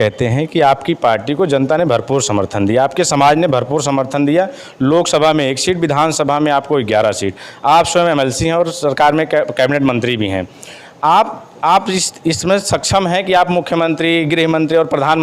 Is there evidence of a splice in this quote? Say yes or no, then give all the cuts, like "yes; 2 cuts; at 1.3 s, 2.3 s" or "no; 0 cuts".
no; 0 cuts